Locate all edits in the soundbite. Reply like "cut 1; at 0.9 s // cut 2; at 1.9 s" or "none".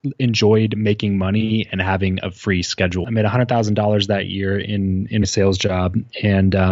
cut 1; at 3.0 s